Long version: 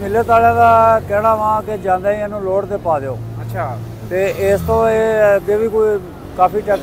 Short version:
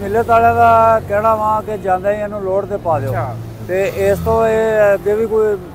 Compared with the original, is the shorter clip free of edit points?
no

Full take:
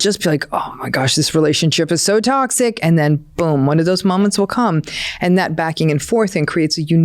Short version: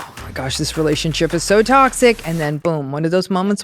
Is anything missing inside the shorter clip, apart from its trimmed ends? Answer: yes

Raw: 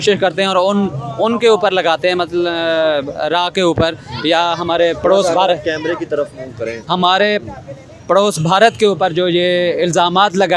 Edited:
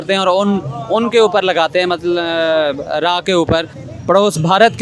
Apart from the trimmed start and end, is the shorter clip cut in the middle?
yes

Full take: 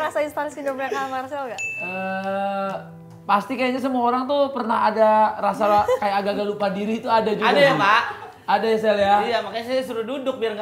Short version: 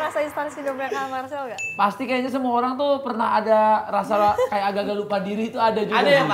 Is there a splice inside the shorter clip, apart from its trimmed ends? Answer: yes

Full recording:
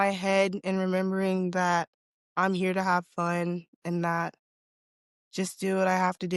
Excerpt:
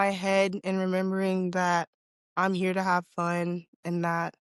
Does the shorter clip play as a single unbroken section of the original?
yes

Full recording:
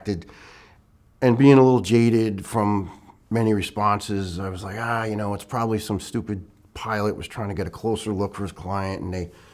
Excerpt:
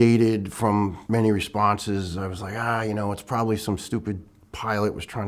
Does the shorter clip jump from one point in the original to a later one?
yes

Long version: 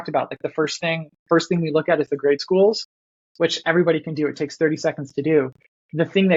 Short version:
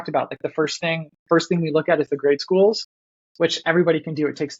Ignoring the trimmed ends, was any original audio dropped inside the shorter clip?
no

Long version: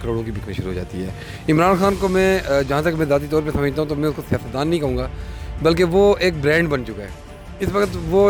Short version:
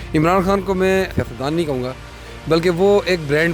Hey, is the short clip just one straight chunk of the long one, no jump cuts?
no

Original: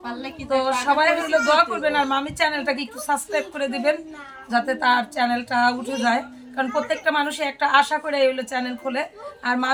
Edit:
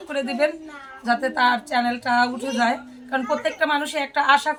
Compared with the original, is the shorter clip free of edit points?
yes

